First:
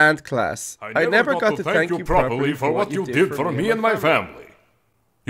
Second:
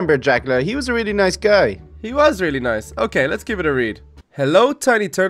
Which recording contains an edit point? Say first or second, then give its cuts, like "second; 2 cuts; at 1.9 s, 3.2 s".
second; 1 cut; at 3.7 s